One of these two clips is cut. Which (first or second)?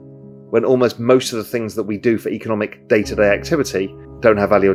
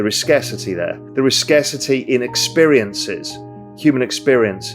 second